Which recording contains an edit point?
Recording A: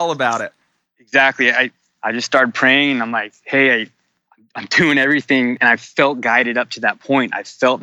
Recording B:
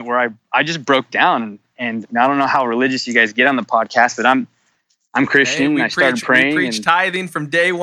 A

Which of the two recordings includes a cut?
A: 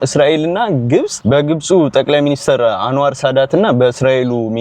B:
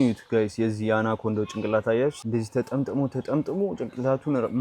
B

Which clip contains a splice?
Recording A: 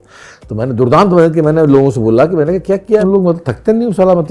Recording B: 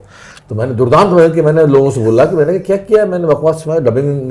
A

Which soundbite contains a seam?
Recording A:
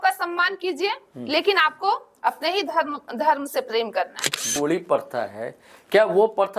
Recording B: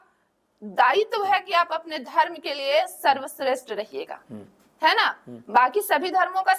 A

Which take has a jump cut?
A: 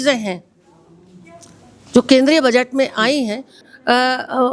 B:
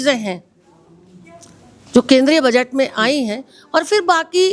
A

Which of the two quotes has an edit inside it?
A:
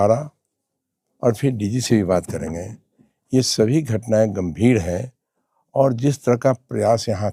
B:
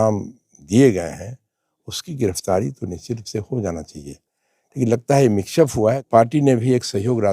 B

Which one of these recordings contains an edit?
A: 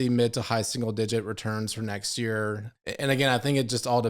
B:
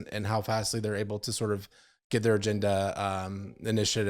A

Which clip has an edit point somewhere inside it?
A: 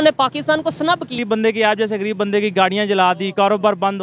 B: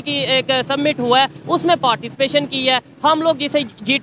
A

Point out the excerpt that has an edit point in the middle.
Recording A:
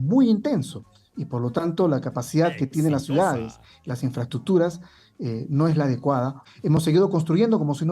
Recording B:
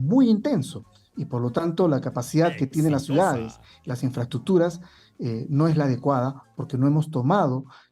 A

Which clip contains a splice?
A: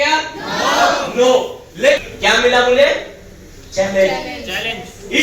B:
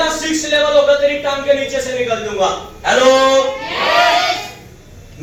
A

